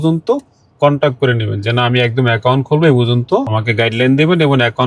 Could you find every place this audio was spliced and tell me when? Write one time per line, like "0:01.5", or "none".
0:03.5